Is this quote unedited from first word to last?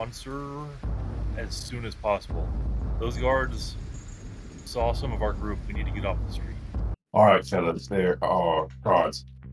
no; 1 cut; at 6.9 s

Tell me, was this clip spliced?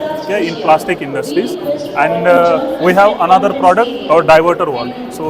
no; 0 cuts

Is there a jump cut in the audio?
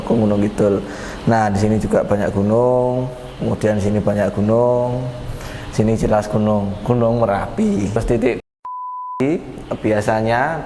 yes; 1 cut; at 8.0 s

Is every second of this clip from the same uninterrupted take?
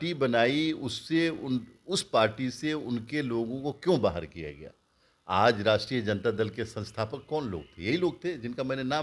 yes; 0 cuts

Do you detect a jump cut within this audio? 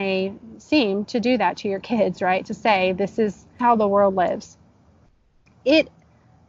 yes; 1 cut; at 3.6 s

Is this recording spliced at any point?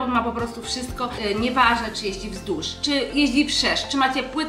yes; 1 cut; at 1.1 s

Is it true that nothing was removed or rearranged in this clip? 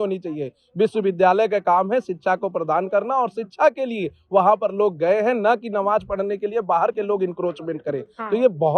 yes; 0 cuts

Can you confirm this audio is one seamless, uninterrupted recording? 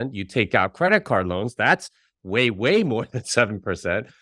yes; 0 cuts

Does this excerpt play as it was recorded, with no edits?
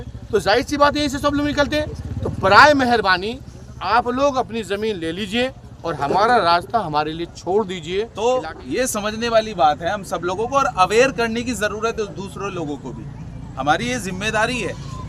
no; 1 cut; at 8.1 s

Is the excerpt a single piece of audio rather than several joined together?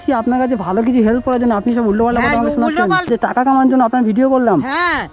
no; 1 cut; at 3.1 s

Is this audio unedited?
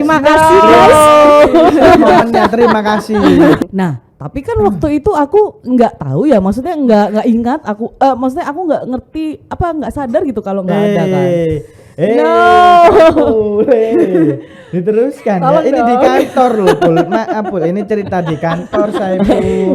no; 1 cut; at 3.6 s

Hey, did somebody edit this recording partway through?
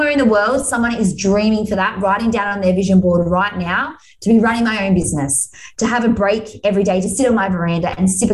no; 0 cuts

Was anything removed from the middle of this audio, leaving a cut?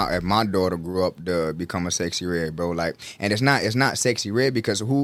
no; 0 cuts

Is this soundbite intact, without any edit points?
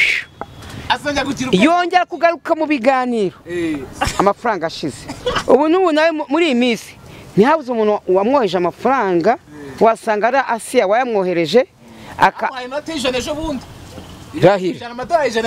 yes; 0 cuts

